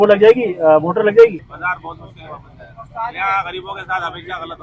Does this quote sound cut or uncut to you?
cut